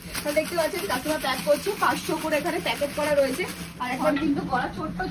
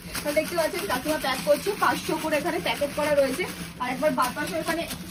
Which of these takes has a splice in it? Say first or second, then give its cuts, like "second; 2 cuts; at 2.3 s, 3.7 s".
first; 1 cut; at 4.0 s